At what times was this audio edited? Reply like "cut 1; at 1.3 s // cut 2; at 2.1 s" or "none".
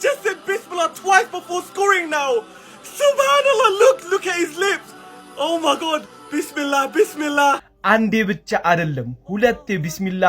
cut 1; at 7.7 s